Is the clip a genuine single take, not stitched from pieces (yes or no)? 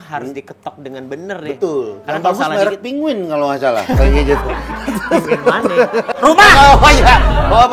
no